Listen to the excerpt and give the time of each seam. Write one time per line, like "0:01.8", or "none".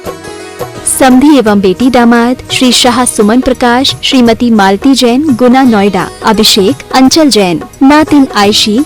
0:01.0